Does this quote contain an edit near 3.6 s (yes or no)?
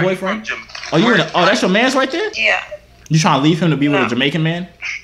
no